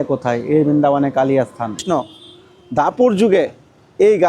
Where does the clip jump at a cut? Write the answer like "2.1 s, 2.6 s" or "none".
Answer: 1.8 s